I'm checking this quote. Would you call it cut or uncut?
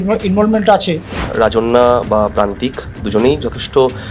cut